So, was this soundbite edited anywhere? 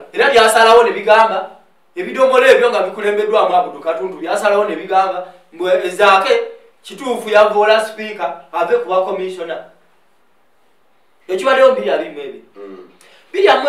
no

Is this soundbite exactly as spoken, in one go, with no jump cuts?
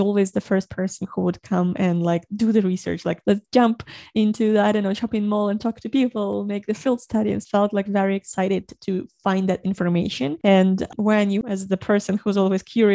no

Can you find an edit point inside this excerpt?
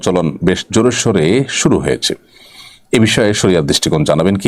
no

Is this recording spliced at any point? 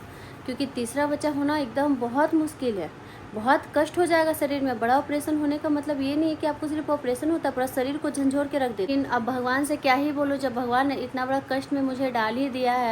yes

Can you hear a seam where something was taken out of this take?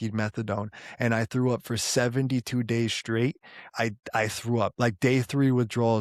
no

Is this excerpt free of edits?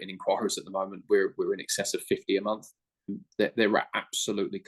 no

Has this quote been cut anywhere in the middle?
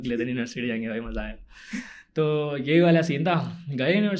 no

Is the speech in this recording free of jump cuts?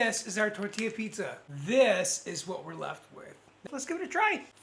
no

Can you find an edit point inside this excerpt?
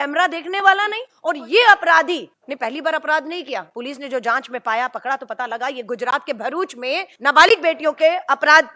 yes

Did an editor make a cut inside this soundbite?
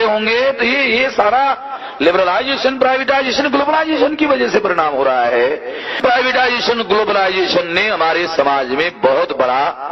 yes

